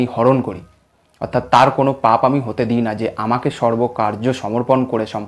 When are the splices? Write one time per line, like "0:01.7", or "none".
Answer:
none